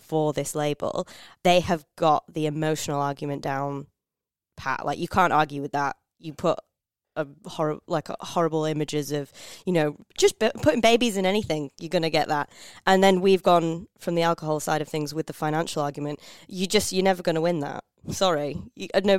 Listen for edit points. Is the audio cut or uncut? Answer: cut